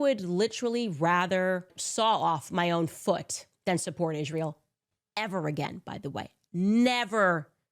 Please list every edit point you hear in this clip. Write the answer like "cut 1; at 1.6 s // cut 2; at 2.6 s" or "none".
cut 1; at 1.8 s